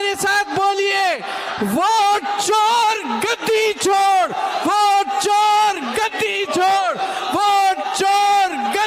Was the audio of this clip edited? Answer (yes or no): no